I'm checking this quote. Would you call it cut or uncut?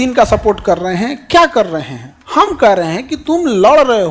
cut